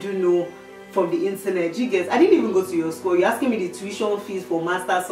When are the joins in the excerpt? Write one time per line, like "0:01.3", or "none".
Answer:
none

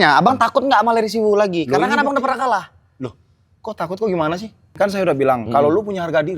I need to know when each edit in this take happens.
0:04.7

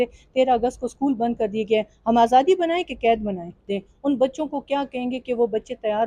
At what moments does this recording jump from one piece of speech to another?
0:03.6

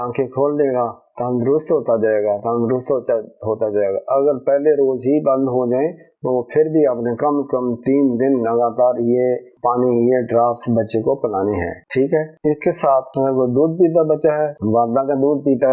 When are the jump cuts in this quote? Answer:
none

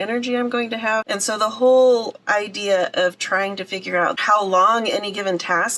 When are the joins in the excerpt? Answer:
0:01.1
0:04.2

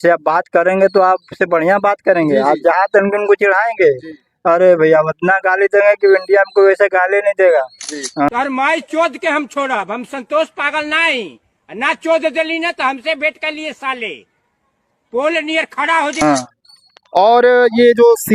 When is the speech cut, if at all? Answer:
0:08.3
0:16.2

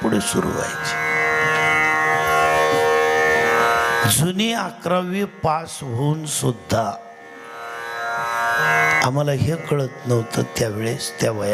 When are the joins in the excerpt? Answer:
none

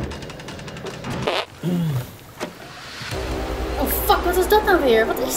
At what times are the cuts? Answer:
0:01.3

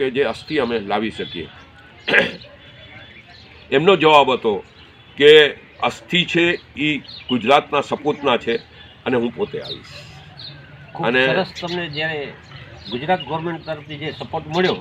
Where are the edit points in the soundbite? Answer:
none

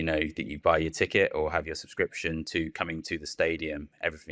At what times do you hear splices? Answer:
none

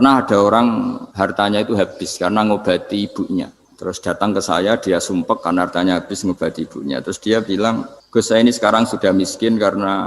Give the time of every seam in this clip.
0:01.0
0:03.6
0:08.0

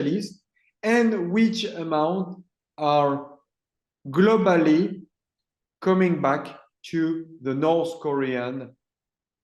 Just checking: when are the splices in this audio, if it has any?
none

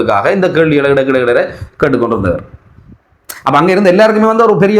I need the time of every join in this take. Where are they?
none

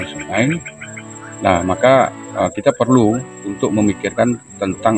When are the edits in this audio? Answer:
none

